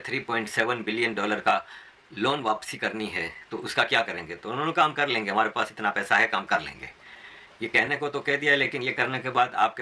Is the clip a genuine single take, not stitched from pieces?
yes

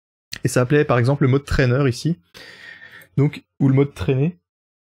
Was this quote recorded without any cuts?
yes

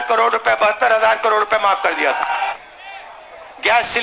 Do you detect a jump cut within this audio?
yes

